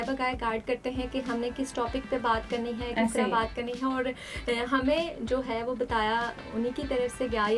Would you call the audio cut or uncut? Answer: uncut